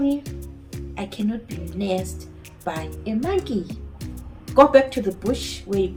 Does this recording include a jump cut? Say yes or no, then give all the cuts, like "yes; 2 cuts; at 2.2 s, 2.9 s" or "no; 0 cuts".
no; 0 cuts